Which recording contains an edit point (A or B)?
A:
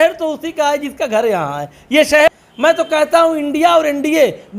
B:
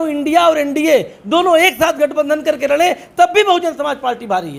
A